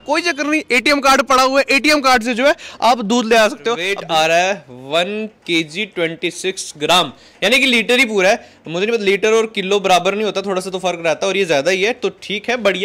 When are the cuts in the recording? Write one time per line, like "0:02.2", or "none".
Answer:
0:03.9